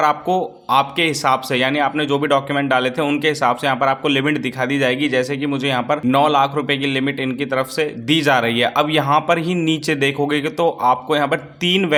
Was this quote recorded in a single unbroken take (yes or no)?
yes